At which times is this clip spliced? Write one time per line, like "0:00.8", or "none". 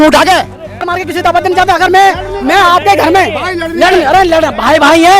0:00.9

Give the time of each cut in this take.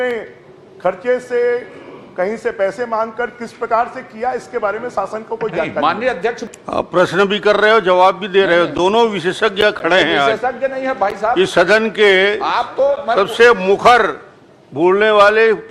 0:06.5

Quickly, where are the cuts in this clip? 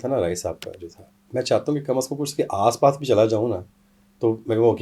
none

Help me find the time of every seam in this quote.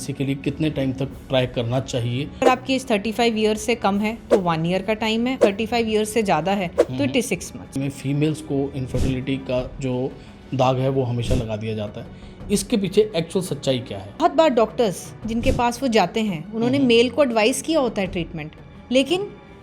0:02.4
0:05.4
0:07.7
0:14.2

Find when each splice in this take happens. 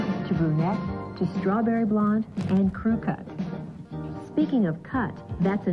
none

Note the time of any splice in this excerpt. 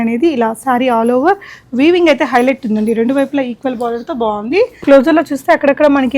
0:04.8

